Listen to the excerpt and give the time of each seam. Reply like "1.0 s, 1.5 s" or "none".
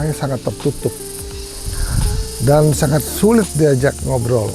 none

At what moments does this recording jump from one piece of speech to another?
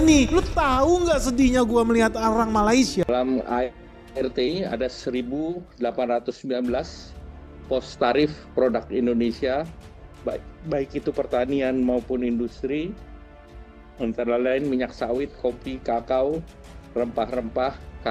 3.0 s

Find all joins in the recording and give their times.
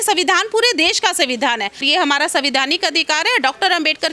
1.9 s

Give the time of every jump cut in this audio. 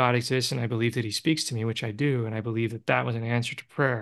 none

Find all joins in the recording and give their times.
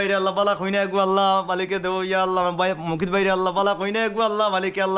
none

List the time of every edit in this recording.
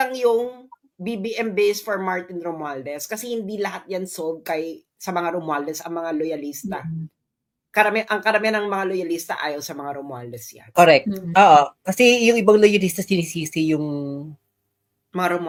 none

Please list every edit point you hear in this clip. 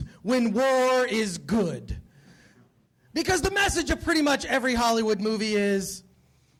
none

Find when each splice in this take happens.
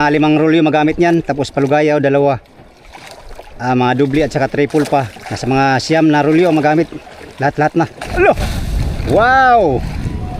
8.0 s

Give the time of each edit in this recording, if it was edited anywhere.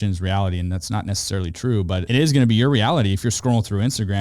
2.0 s

